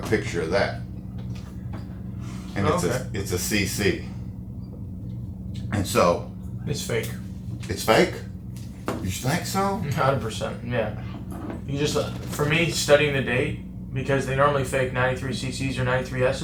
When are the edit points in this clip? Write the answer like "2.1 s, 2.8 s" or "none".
none